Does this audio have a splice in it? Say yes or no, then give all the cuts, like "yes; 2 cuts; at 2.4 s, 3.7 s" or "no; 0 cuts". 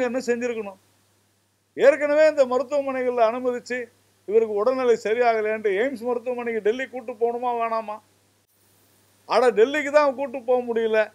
no; 0 cuts